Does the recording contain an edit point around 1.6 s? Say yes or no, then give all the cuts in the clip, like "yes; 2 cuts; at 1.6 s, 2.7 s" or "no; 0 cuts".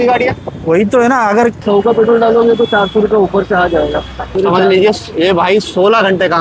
yes; 2 cuts; at 1.6 s, 4.4 s